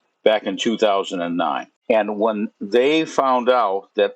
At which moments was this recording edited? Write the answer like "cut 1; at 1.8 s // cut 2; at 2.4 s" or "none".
cut 1; at 1.7 s